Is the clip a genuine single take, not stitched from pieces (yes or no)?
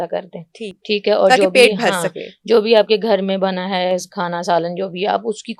yes